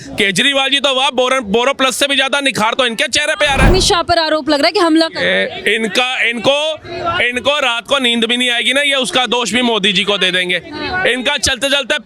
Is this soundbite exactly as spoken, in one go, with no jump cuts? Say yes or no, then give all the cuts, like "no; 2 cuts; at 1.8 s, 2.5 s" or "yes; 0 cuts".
no; 1 cut; at 3.7 s